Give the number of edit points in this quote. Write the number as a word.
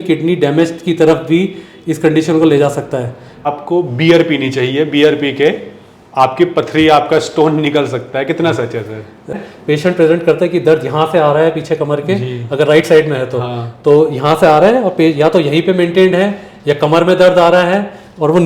two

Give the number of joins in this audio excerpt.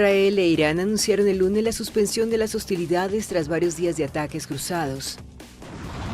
one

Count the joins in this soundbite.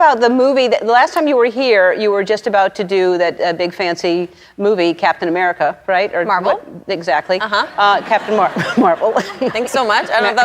one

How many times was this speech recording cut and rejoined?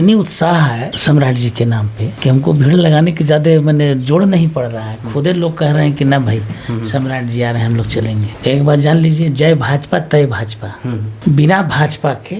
three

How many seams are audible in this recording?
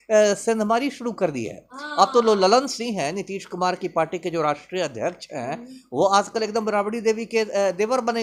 zero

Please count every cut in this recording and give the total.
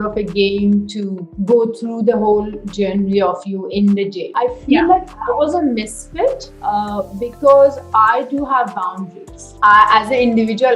two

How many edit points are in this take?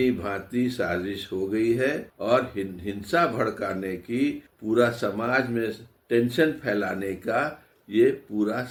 zero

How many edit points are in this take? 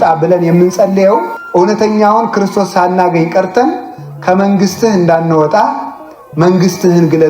one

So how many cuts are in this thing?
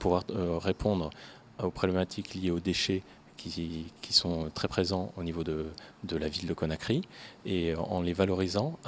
zero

